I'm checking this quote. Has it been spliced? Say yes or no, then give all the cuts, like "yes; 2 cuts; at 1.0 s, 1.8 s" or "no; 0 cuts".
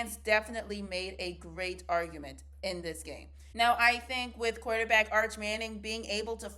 yes; 1 cut; at 3.4 s